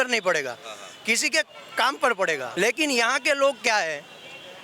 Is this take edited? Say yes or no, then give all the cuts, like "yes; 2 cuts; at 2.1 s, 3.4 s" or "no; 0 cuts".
yes; 1 cut; at 2.5 s